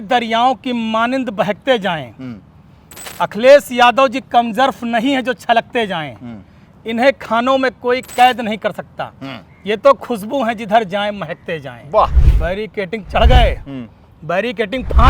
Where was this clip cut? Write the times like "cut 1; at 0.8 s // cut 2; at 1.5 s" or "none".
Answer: cut 1; at 12.3 s